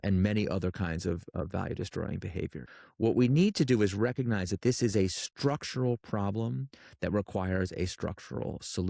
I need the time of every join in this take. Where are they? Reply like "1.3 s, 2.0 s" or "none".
2.7 s